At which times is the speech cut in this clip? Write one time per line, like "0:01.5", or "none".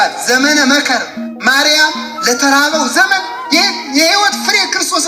none

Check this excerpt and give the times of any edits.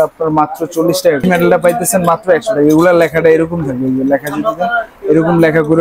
0:01.2

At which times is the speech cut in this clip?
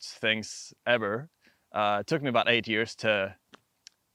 none

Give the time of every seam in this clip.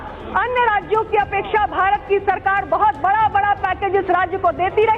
none

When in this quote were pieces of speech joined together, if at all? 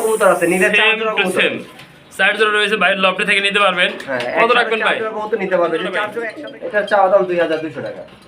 0:06.2

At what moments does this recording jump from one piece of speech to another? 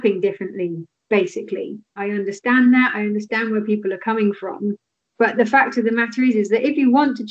0:02.0

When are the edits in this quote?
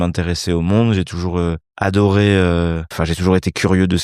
0:01.7
0:02.9

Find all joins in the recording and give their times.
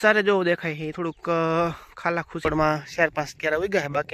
0:02.4

